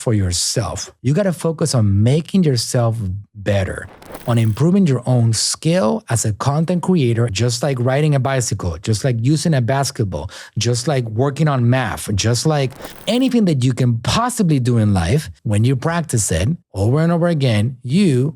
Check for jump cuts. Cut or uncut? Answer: cut